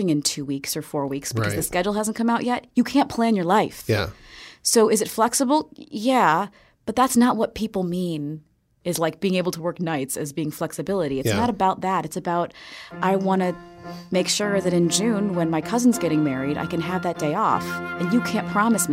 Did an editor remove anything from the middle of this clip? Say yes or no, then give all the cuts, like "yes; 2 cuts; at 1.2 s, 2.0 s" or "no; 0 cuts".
no; 0 cuts